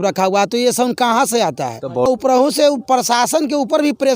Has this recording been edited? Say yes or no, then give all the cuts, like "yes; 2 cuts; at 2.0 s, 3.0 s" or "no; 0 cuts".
yes; 1 cut; at 2.1 s